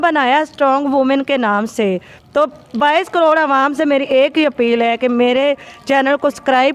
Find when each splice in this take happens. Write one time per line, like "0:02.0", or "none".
none